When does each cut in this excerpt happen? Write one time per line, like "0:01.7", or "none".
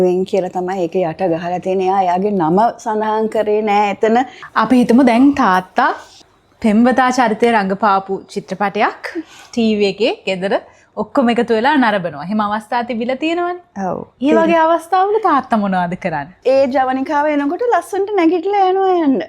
0:04.4
0:16.3